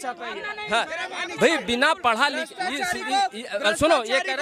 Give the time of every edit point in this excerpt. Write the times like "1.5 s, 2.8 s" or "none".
none